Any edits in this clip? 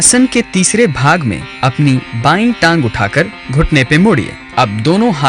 no; 0 cuts

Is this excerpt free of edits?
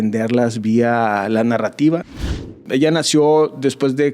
no; 1 cut; at 2.6 s

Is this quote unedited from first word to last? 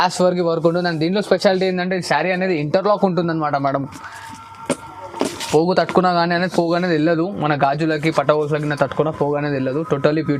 yes; 0 cuts

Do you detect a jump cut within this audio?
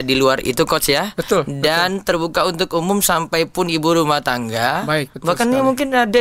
yes; 1 cut; at 5.1 s

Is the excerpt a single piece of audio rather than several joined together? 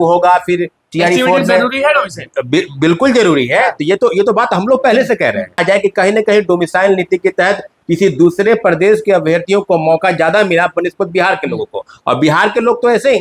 no; 1 cut; at 5.6 s

